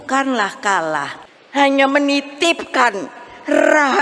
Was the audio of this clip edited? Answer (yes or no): yes